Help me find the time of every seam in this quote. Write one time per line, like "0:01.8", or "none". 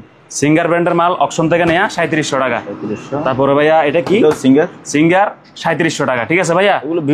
none